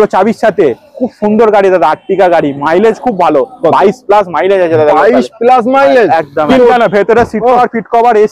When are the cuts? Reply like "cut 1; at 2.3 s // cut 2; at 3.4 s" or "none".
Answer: cut 1; at 6.5 s